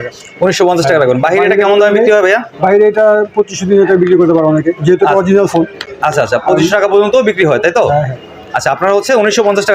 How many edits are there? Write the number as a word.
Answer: zero